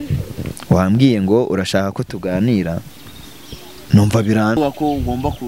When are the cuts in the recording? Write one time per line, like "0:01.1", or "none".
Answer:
0:04.6